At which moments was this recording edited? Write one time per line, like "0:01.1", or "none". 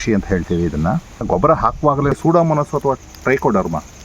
0:01.2
0:02.1